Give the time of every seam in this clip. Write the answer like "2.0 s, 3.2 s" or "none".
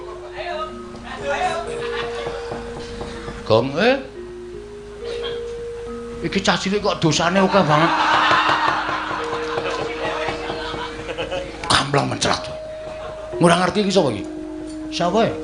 none